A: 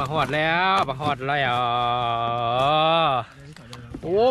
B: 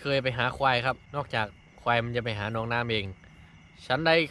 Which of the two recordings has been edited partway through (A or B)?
B